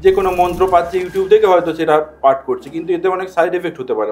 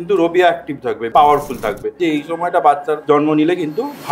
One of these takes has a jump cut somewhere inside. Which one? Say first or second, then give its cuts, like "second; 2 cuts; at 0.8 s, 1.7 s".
second; 3 cuts; at 1.1 s, 2.0 s, 3.0 s